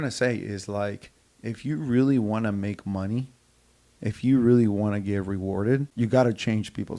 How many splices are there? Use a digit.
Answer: 1